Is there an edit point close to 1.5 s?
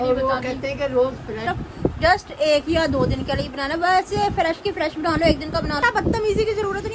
yes; 2 cuts; at 1.5 s, 5.8 s

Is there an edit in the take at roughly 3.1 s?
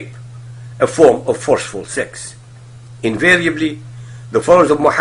no; 0 cuts

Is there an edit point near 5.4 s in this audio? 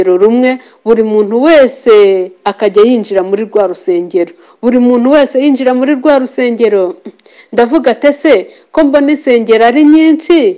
no; 0 cuts

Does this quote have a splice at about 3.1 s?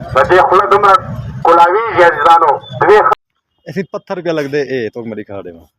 yes; 1 cut; at 3.1 s

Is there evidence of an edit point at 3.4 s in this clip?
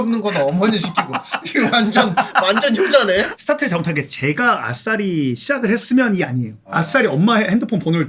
yes; 2 cuts; at 3.4 s, 6.6 s

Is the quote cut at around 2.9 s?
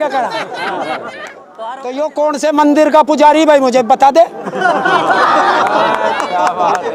no; 1 cut; at 1.5 s

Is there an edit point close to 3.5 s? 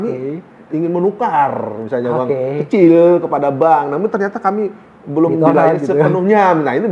no; 0 cuts

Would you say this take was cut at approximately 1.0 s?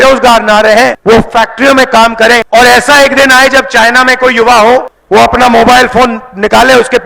yes; 3 cuts; at 1.0 s, 2.4 s, 5.0 s

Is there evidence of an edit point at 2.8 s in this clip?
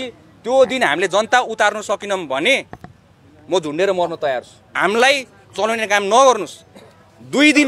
no; 1 cut; at 4.8 s

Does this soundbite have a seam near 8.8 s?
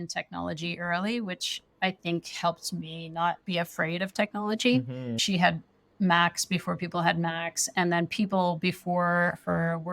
no; 1 cut; at 5.2 s

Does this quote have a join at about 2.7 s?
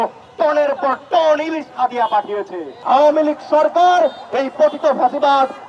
yes; 1 cut; at 2.7 s

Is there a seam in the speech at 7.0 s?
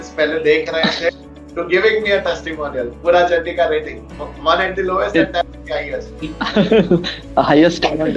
no; 0 cuts

